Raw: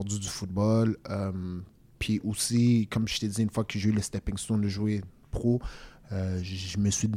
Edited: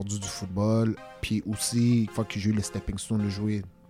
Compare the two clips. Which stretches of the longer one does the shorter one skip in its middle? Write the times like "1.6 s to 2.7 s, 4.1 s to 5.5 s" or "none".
1.0 s to 1.8 s, 2.9 s to 3.5 s

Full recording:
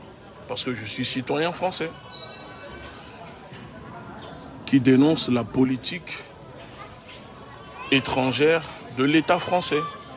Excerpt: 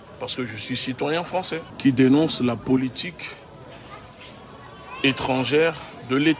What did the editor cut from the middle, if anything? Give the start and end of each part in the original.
2.0 s to 4.6 s

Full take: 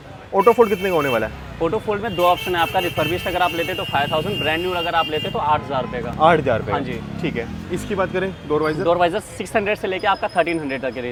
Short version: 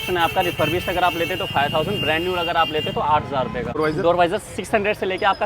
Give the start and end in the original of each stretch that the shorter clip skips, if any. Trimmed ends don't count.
6.2 s to 8.6 s

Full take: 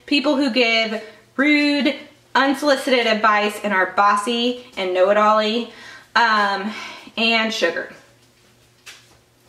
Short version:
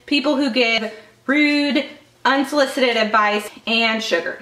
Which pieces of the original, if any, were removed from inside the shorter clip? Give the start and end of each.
0.8 s to 0.9 s, 3.6 s to 7.0 s

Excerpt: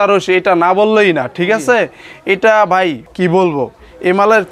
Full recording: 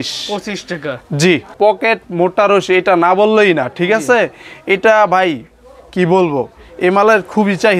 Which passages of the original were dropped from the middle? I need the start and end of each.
5.5 s to 5.8 s

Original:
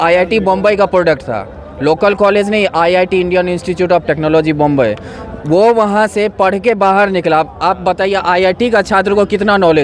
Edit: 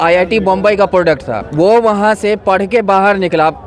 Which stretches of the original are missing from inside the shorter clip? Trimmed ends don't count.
1.4 s to 5.3 s

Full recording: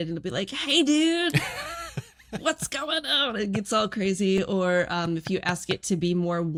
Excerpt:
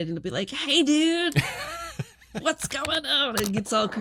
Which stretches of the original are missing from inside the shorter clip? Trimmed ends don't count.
none

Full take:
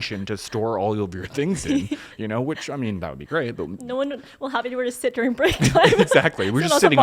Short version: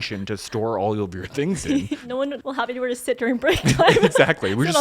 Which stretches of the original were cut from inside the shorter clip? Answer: 2.2 s to 4.2 s

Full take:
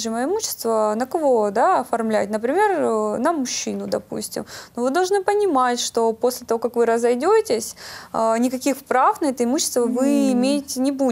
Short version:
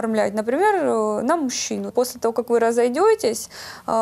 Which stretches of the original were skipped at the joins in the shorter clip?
3.9 s to 6.2 s

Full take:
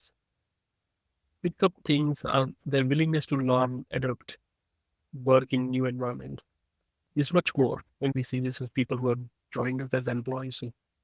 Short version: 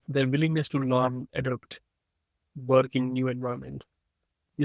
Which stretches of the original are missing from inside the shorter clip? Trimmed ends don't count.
none

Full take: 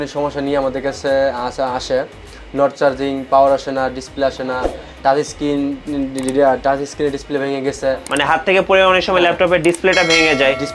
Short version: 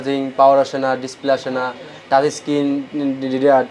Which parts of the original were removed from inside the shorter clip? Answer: none

